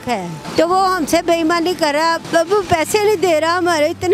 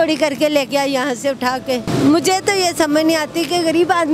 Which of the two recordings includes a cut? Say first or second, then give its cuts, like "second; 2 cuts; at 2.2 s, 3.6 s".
second; 1 cut; at 1.9 s